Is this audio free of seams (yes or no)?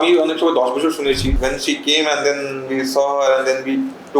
no